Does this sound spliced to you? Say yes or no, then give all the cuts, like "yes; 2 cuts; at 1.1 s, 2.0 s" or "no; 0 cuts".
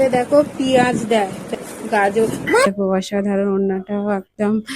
yes; 2 cuts; at 1.4 s, 2.7 s